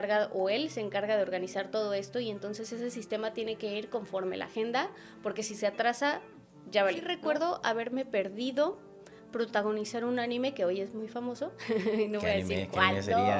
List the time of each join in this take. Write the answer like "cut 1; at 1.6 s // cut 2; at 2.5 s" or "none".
cut 1; at 7.1 s